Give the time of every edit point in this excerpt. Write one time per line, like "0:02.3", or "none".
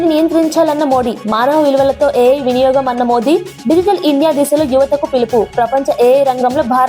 none